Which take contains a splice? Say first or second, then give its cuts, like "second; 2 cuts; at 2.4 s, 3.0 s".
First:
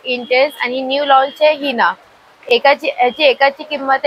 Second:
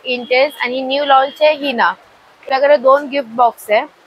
second; 1 cut; at 2.4 s